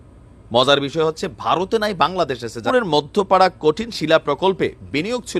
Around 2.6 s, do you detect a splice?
yes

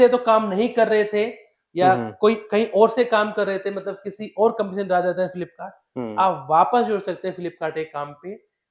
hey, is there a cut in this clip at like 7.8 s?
no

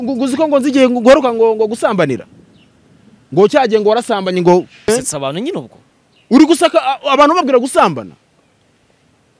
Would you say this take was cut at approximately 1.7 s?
no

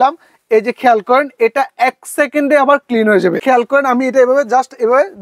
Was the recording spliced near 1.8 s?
no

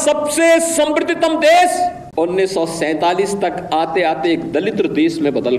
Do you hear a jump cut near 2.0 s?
yes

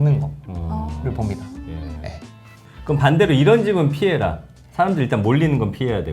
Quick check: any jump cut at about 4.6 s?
no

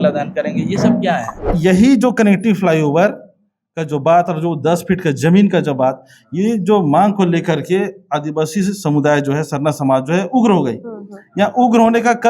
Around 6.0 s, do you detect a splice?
no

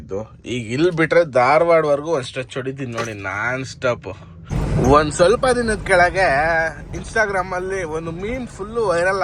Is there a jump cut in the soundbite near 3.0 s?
no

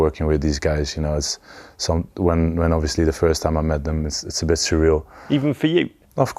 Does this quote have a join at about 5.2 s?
yes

